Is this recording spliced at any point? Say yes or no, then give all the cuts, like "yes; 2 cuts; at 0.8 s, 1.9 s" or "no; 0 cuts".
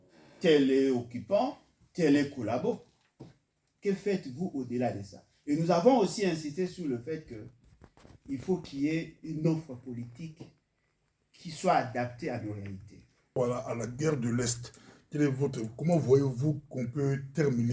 yes; 1 cut; at 13.4 s